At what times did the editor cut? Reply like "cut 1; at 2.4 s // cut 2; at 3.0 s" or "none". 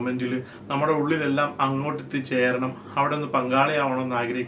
none